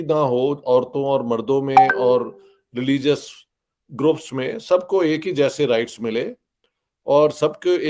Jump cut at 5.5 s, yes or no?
no